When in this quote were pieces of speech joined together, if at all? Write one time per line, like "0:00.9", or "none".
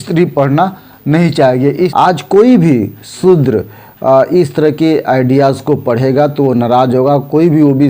0:01.9